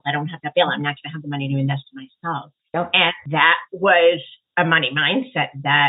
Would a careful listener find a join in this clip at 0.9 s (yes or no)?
no